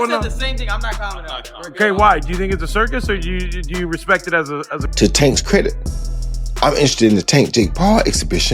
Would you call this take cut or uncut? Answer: cut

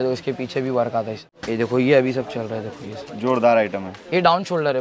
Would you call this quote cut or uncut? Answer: cut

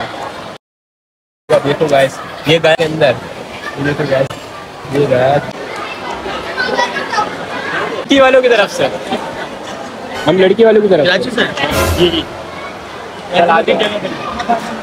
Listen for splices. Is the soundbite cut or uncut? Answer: cut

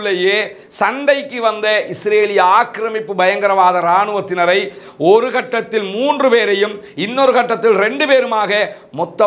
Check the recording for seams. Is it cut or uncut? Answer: uncut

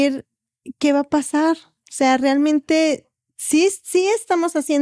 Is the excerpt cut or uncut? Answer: uncut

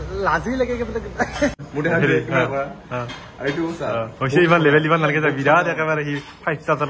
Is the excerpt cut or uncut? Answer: cut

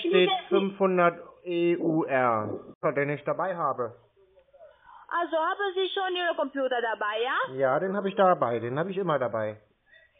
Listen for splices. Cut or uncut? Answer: cut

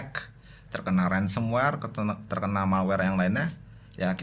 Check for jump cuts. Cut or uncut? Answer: uncut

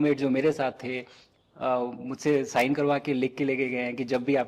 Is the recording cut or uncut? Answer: uncut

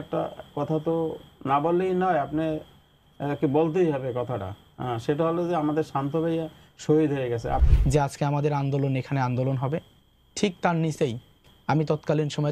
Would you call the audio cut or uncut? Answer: cut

